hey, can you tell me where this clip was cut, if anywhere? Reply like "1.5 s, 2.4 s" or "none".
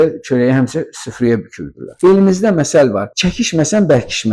2.0 s